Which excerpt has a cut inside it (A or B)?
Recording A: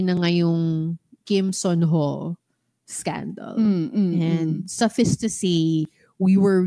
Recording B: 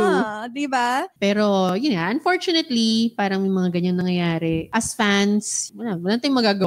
B